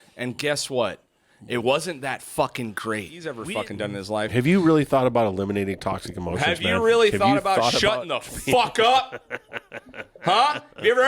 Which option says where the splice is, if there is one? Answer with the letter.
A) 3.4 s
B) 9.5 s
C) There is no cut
A